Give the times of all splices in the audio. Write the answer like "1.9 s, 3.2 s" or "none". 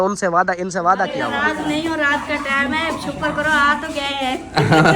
1.2 s